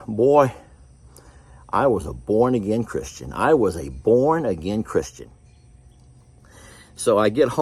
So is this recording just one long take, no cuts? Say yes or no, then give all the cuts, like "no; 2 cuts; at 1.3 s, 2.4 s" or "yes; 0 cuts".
no; 1 cut; at 5.2 s